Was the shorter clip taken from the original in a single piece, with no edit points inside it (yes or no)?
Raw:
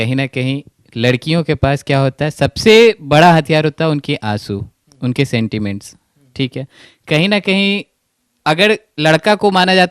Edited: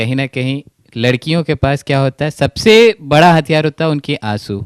yes